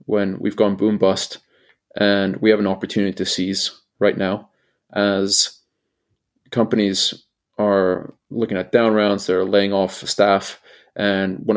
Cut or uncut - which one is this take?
uncut